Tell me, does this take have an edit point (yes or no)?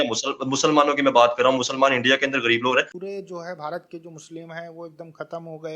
yes